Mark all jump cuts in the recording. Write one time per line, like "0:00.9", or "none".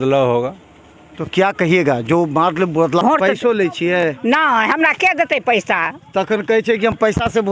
0:03.0